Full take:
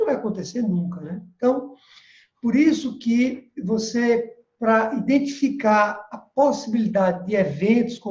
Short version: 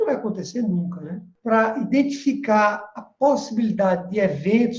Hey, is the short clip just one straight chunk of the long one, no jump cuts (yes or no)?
no